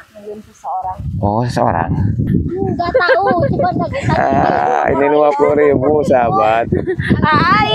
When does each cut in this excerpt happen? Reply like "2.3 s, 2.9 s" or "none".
2.3 s